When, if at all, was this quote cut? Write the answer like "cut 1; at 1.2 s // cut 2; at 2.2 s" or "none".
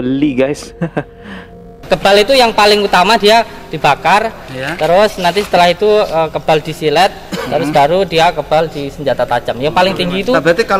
none